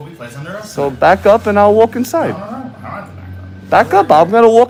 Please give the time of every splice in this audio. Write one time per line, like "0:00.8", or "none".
none